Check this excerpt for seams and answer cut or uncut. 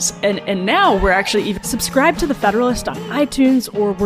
cut